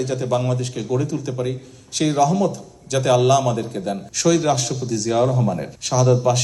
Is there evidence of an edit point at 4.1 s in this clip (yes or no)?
yes